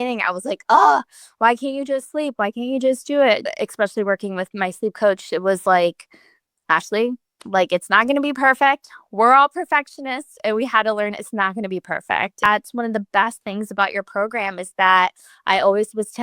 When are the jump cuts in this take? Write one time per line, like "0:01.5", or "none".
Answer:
0:03.4
0:12.5